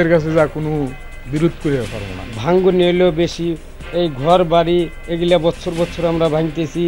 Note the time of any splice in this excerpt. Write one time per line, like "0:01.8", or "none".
none